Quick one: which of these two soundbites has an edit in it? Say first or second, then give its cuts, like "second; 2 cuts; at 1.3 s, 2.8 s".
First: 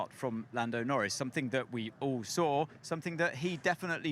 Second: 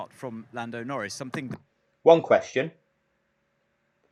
first; 1 cut; at 1.4 s